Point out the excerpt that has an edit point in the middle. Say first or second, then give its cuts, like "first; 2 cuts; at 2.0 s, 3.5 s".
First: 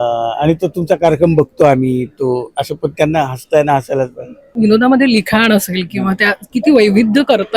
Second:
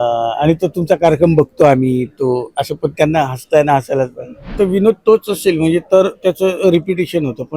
second; 1 cut; at 4.5 s